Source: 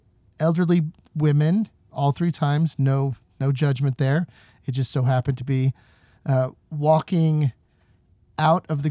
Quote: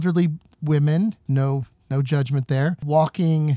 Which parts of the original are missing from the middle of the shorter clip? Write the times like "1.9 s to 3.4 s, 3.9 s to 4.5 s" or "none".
1.8 s to 2.7 s, 4.3 s to 6.7 s